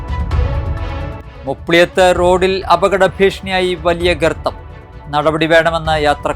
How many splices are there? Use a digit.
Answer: 1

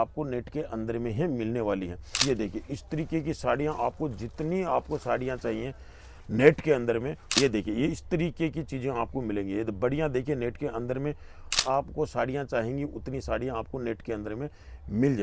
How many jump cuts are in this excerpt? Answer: 3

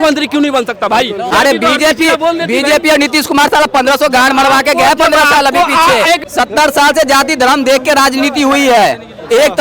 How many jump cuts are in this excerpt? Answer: 2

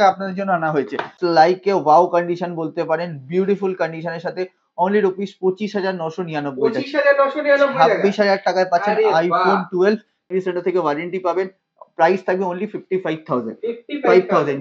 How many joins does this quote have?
2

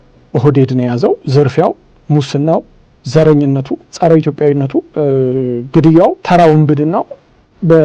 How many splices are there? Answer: 4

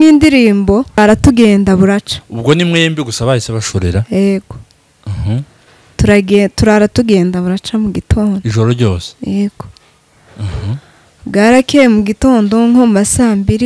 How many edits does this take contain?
1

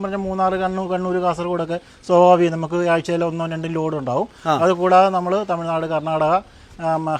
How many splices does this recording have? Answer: 0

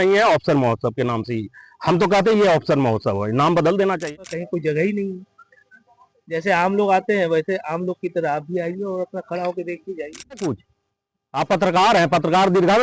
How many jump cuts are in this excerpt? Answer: 2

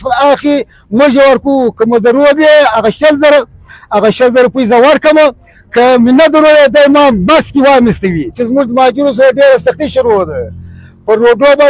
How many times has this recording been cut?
1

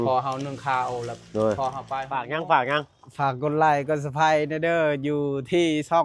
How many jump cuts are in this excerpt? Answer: 1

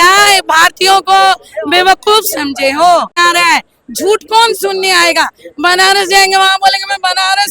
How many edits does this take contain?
1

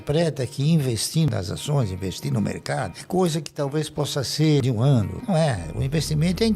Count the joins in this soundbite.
2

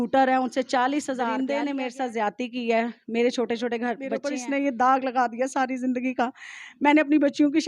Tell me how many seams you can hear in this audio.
2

